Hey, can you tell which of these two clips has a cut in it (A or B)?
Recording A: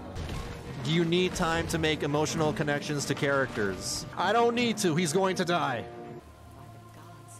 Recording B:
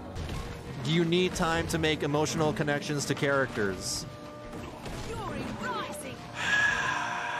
A